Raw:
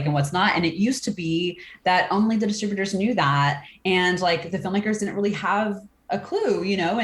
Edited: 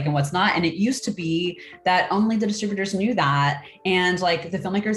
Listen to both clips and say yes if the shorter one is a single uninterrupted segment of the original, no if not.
yes